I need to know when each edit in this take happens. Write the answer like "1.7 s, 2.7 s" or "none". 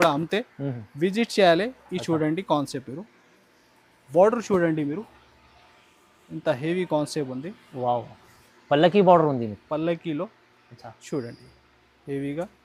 none